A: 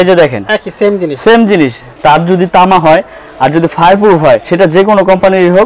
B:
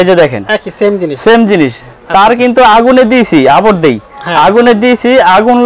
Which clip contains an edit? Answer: A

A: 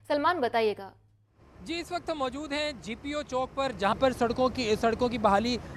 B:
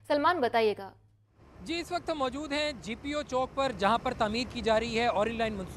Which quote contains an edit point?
B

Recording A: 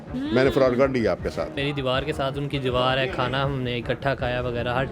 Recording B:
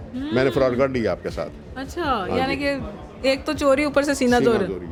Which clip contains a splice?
A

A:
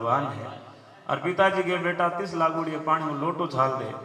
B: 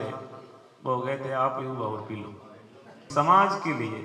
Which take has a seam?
B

